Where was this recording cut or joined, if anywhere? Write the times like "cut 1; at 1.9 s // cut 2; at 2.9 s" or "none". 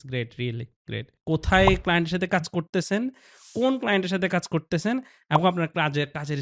cut 1; at 1.1 s